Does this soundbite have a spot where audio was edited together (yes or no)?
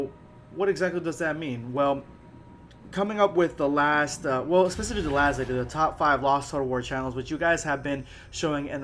yes